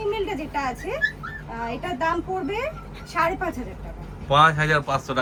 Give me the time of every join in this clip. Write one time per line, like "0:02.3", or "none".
none

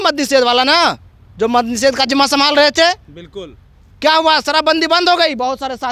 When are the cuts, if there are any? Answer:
none

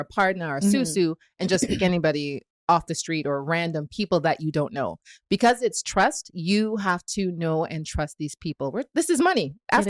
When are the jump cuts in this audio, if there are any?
none

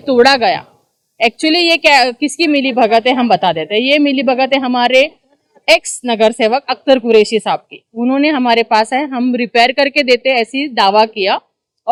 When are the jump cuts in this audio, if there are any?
none

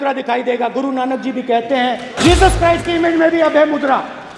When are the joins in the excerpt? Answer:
0:02.1

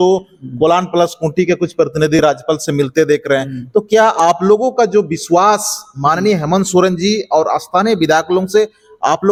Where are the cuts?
none

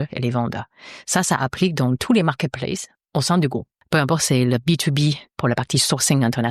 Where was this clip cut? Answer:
0:02.9
0:03.8
0:05.3

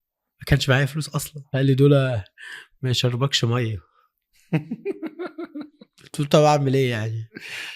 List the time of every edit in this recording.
0:01.4

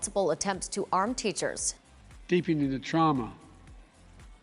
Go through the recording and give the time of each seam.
0:01.8

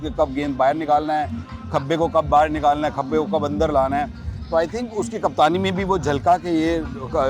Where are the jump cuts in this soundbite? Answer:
none

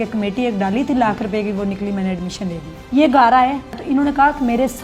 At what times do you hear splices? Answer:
0:02.7
0:03.8

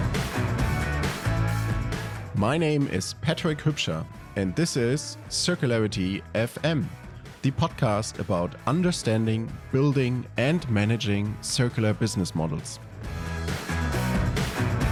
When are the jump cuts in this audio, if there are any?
none

